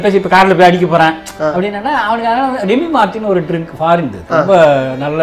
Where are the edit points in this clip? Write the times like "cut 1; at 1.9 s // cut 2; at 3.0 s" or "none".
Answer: cut 1; at 1.3 s // cut 2; at 4.2 s

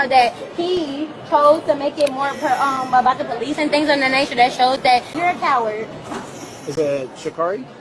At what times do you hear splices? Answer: cut 1; at 5.1 s

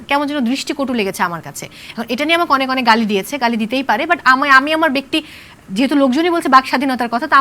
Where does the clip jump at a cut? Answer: none

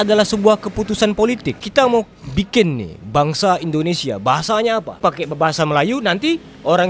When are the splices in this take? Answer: cut 1; at 1.6 s // cut 2; at 4.9 s

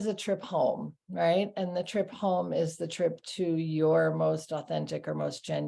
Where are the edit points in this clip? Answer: none

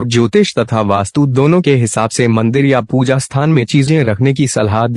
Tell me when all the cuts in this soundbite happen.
none

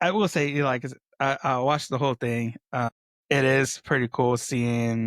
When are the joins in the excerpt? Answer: cut 1; at 3.1 s

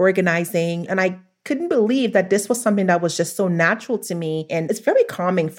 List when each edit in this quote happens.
cut 1; at 0.9 s // cut 2; at 4.6 s

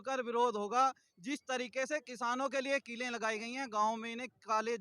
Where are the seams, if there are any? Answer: none

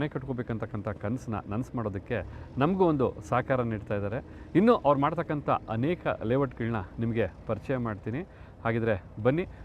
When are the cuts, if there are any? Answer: none

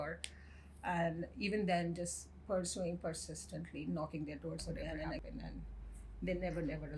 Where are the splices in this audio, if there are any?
cut 1; at 5.2 s

